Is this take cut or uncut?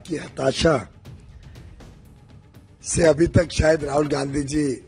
cut